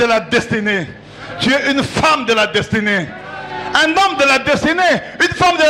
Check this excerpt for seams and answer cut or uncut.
uncut